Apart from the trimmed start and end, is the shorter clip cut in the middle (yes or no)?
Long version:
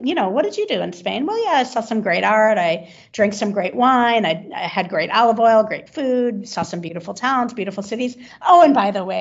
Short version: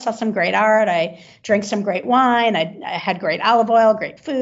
no